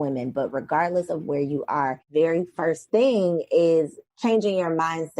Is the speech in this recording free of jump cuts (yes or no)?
no